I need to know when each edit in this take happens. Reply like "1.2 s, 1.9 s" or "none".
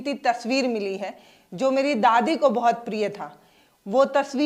none